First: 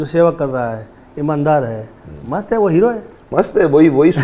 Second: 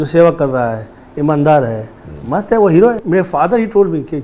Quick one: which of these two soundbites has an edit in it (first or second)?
second